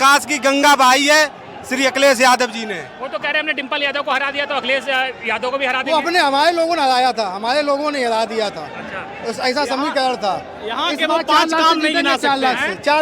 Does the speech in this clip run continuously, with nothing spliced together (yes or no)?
yes